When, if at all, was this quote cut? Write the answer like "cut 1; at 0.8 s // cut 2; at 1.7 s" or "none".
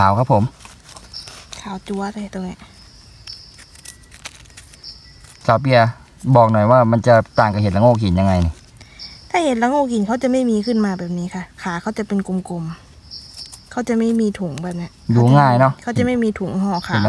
none